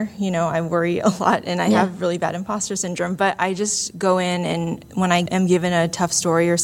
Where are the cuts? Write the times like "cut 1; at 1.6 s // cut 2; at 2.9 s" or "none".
cut 1; at 5.2 s